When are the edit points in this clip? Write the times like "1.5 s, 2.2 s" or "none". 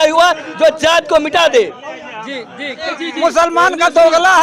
2.9 s